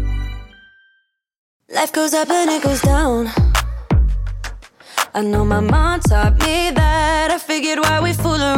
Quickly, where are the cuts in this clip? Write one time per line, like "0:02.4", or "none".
0:01.9

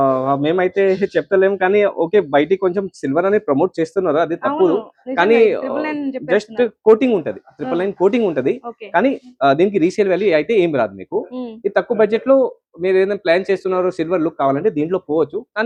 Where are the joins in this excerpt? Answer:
none

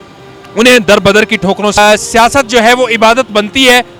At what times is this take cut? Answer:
0:01.8

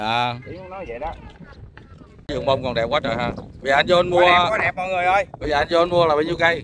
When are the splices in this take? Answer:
0:02.3

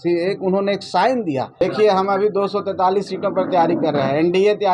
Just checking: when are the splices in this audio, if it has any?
0:01.6

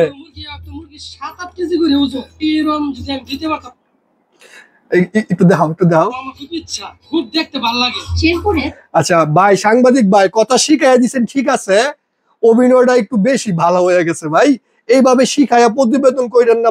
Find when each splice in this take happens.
none

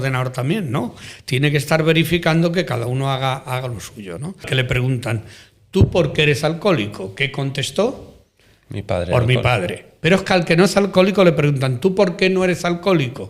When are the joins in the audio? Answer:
0:04.5

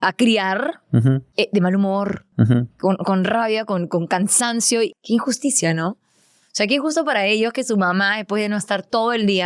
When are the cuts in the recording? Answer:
0:01.3
0:04.9

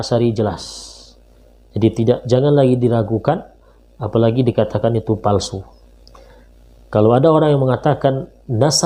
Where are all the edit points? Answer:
none

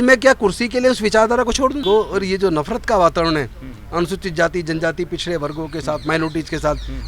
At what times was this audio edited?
0:01.8

